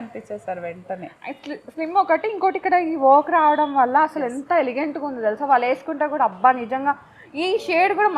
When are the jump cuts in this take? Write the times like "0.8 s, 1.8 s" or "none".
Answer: none